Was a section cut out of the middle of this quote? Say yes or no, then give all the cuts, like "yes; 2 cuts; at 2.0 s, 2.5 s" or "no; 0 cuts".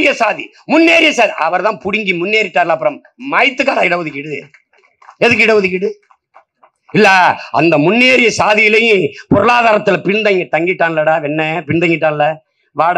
no; 0 cuts